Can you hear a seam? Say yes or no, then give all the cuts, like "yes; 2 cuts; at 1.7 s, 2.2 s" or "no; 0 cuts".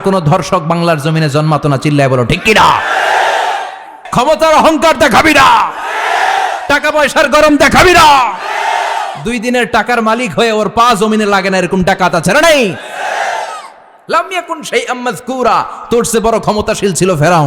yes; 1 cut; at 4.0 s